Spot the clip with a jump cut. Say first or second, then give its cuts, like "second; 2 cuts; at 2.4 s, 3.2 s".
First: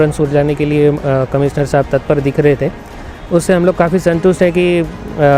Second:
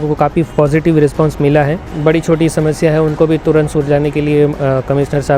second; 1 cut; at 1.9 s